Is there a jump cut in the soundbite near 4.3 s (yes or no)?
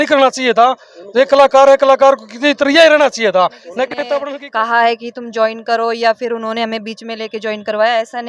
yes